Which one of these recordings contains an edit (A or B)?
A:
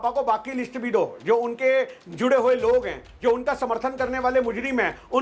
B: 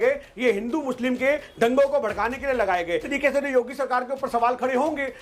B